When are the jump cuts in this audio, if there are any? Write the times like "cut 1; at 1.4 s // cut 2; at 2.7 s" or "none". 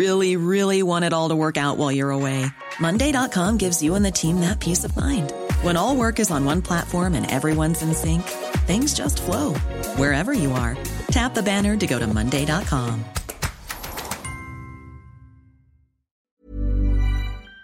cut 1; at 16.2 s